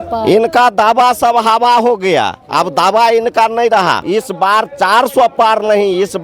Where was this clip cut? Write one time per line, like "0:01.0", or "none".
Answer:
0:04.0